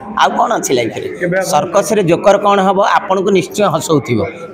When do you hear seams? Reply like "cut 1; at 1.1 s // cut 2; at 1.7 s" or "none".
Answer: cut 1; at 1.4 s